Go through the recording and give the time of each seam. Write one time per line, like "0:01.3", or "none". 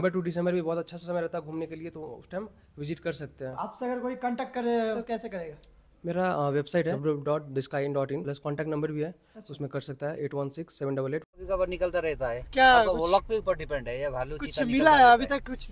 0:03.6
0:05.0
0:07.0
0:08.3
0:11.4